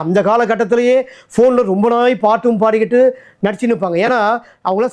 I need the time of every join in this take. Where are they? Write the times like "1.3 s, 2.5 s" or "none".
none